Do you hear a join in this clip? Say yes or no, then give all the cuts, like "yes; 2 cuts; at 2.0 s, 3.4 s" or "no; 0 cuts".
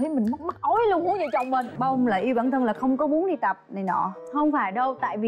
yes; 1 cut; at 1.7 s